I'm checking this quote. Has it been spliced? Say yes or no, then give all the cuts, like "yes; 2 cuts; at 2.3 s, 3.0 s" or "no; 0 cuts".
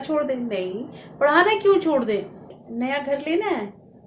yes; 1 cut; at 2.6 s